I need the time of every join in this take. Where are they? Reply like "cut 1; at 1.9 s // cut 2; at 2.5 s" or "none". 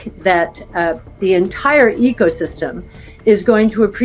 cut 1; at 1.2 s